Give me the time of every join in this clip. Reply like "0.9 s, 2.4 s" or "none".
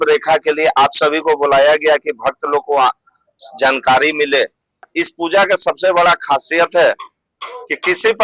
4.9 s